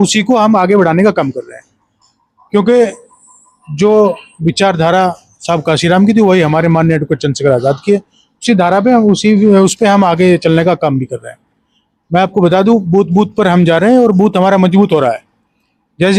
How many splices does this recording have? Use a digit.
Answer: 0